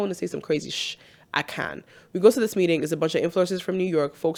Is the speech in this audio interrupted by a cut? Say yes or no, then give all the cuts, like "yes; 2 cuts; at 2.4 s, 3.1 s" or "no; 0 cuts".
no; 0 cuts